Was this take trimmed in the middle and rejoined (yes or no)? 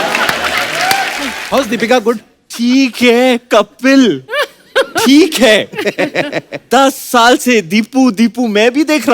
yes